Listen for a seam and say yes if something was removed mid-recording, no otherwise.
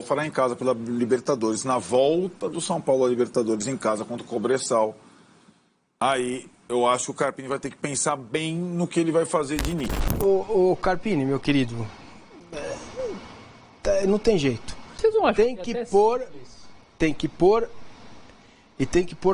yes